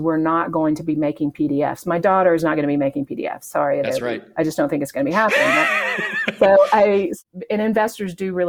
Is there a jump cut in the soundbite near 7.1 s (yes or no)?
yes